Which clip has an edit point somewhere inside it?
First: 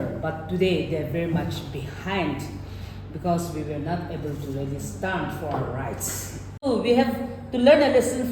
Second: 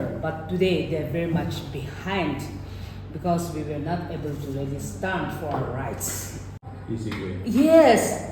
first; 1 cut; at 6.6 s

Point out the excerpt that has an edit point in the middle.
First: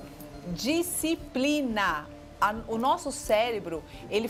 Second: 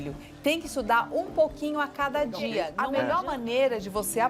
second; 1 cut; at 2.8 s

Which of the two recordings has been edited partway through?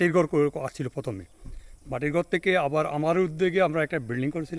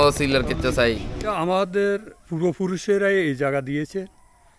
second; 1 cut; at 1.3 s

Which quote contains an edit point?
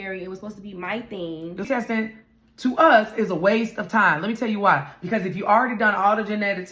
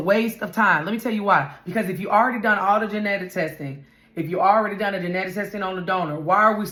first; 1 cut; at 1.7 s

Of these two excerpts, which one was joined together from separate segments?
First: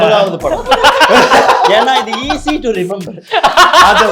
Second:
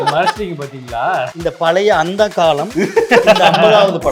second; 2 cuts; at 1.3 s, 2.7 s

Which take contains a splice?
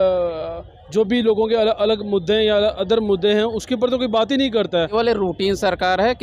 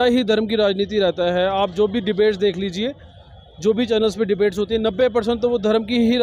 first; 1 cut; at 4.9 s

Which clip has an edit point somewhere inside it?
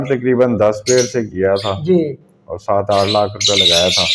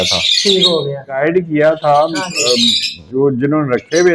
second; 1 cut; at 1.2 s

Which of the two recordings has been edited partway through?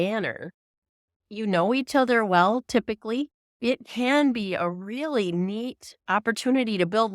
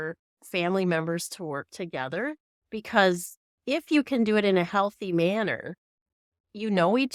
first; 1 cut; at 3.4 s

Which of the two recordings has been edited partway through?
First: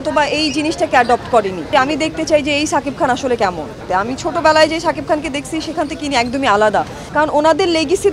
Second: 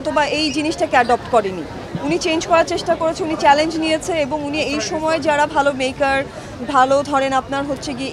first; 3 cuts; at 1.7 s, 3.9 s, 7.0 s

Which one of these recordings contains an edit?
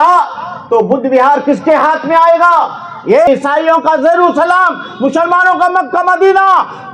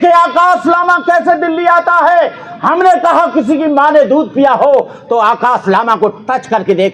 first; 1 cut; at 3.3 s

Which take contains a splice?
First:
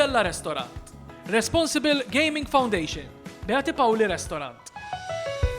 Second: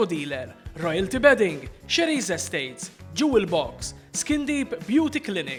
first; 1 cut; at 4.7 s

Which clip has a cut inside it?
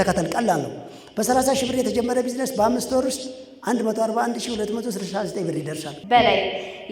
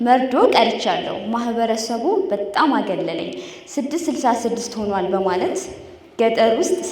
first; 1 cut; at 5.8 s

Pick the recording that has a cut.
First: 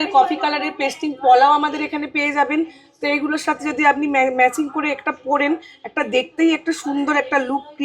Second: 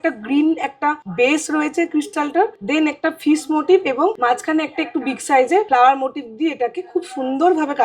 second; 4 cuts; at 1.0 s, 2.6 s, 4.2 s, 5.7 s

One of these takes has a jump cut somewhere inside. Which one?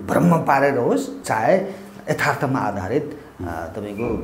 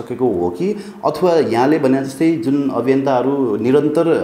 first; 1 cut; at 1.2 s

